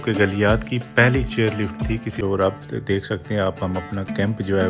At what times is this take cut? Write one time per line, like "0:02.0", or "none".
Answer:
0:02.2